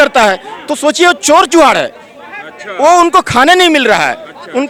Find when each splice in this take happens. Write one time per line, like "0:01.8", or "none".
none